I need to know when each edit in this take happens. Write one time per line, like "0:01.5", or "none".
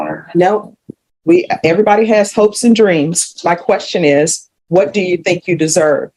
none